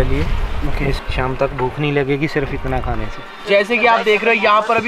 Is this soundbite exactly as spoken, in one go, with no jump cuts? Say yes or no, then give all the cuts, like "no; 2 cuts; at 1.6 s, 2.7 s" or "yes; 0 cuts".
no; 2 cuts; at 1.0 s, 3.4 s